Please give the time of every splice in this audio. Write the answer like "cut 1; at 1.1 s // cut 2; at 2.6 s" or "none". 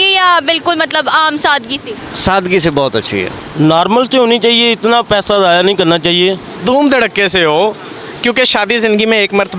cut 1; at 3.4 s // cut 2; at 6.5 s